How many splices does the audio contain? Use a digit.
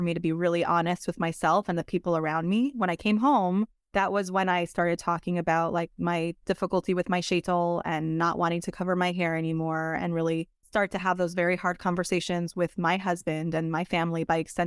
2